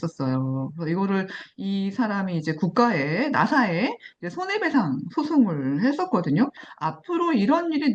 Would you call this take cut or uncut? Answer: uncut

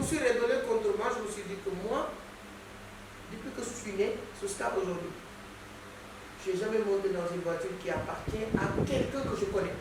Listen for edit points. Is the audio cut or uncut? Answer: uncut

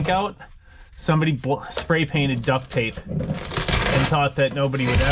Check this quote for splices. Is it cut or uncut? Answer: uncut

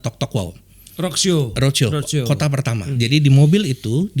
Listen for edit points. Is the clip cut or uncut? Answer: cut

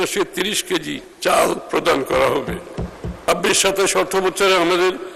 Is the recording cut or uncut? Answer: cut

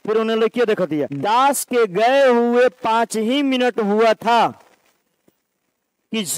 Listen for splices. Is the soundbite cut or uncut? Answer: cut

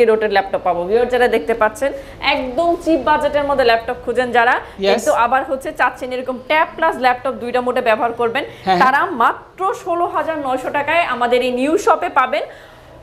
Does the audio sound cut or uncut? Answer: uncut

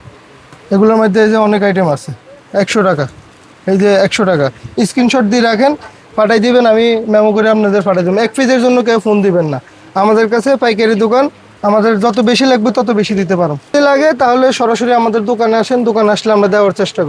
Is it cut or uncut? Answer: uncut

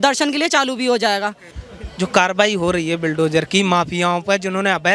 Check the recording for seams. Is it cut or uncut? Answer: cut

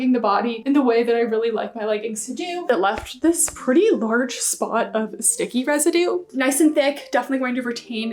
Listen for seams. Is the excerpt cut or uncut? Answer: cut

